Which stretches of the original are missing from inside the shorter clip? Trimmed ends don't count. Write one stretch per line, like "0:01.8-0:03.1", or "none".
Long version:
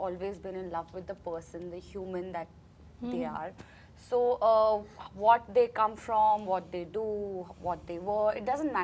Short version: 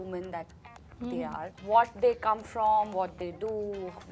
0:03.5-0:05.0